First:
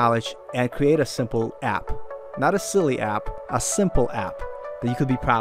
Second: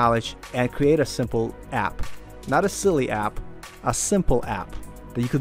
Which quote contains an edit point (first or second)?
first